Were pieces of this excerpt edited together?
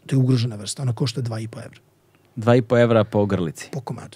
no; 0 cuts

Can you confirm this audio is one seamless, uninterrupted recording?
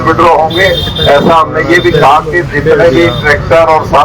yes; 0 cuts

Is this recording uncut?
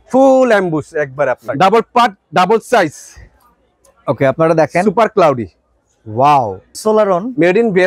no; 2 cuts; at 1.4 s, 6.7 s

